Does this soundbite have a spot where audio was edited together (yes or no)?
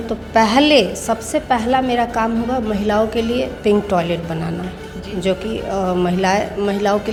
no